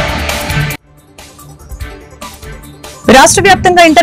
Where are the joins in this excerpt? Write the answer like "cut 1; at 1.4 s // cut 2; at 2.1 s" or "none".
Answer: cut 1; at 2.3 s